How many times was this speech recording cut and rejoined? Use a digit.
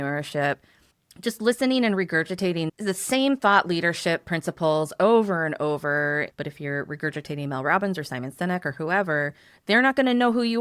1